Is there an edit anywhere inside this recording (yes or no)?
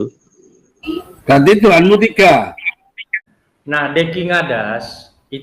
yes